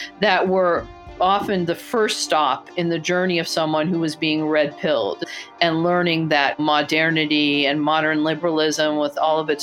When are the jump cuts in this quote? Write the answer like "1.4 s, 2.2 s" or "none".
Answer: 5.2 s